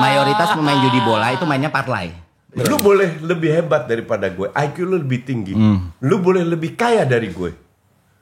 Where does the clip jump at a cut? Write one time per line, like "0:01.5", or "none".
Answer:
0:02.6